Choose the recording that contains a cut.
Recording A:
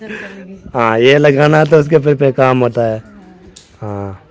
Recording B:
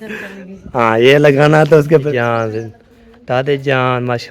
B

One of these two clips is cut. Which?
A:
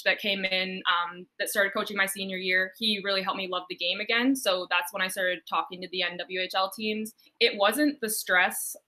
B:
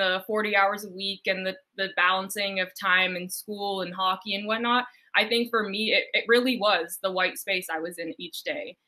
A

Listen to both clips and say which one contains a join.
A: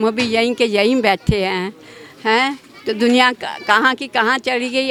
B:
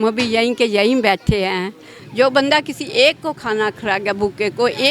B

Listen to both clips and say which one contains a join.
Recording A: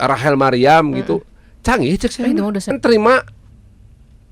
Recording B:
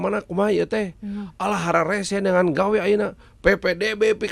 A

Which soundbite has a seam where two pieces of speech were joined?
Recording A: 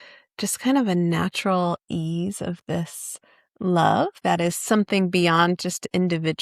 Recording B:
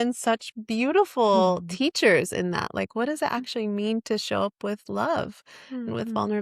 A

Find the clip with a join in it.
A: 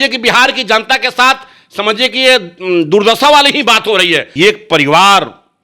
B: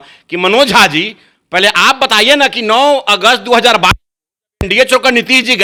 A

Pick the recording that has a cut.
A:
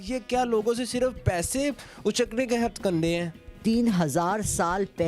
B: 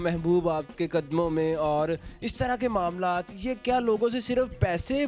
A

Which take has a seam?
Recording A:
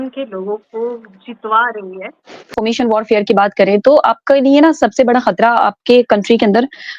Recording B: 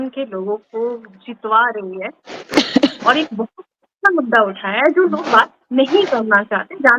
A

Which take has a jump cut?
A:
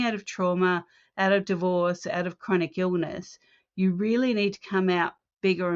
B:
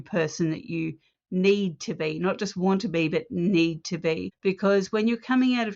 B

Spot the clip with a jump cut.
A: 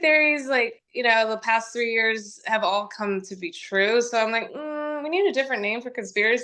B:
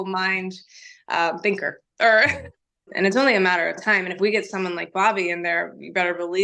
B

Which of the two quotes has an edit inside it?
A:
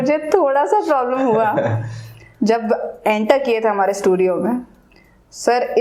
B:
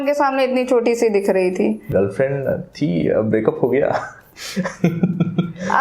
B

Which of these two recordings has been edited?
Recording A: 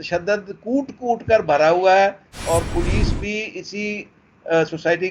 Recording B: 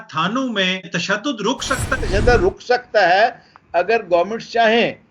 B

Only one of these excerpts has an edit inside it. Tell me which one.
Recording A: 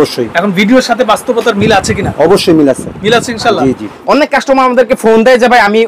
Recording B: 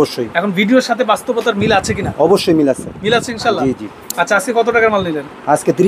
A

